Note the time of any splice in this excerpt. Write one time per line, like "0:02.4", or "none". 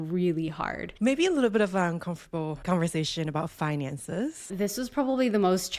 0:00.9
0:02.6
0:04.5